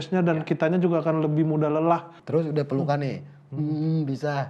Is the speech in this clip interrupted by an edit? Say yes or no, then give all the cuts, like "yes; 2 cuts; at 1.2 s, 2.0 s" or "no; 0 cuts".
yes; 1 cut; at 2.2 s